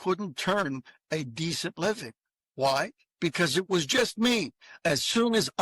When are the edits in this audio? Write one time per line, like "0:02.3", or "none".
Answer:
0:04.7